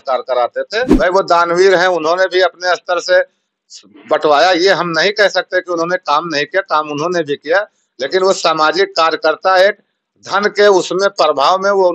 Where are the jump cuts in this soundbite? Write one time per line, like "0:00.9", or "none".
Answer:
0:00.9